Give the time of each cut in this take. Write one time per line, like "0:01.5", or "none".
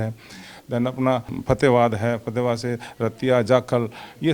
0:01.3